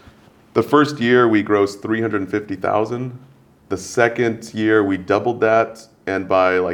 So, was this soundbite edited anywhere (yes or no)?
no